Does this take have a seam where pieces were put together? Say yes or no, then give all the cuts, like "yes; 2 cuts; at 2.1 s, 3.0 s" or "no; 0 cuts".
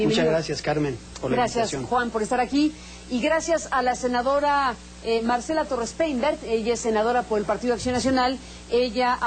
yes; 1 cut; at 7.1 s